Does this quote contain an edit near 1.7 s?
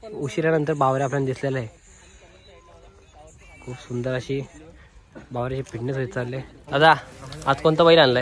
no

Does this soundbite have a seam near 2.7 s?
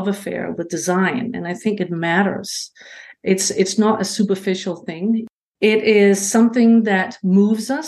no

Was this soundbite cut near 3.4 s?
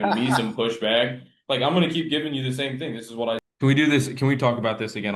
yes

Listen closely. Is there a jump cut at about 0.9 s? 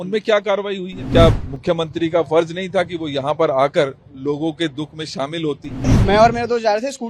yes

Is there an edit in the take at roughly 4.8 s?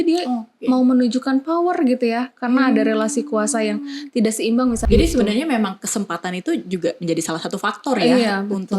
yes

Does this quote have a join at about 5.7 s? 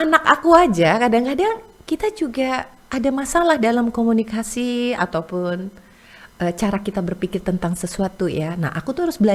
no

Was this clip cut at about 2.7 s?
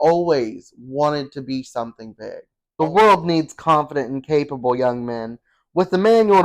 yes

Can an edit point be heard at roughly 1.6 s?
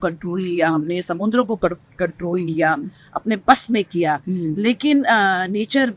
no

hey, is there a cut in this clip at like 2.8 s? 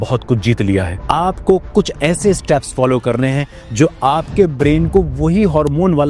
no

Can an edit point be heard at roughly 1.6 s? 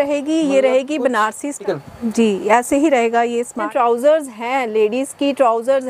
yes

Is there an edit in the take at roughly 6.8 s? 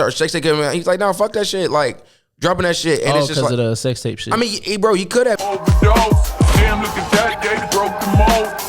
no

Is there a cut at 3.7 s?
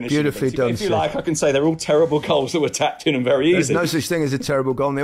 yes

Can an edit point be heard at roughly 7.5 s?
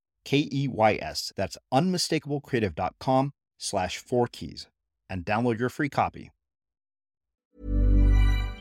yes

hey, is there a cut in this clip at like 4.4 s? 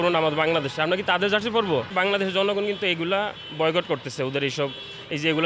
no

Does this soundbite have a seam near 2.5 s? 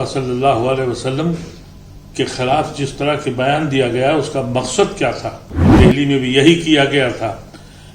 no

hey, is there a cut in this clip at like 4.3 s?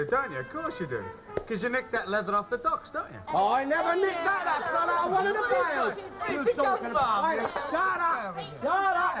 yes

